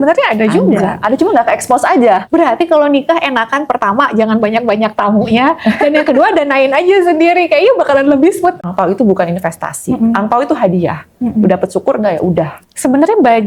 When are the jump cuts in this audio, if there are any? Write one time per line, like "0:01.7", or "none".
0:02.2
0:08.6
0:12.6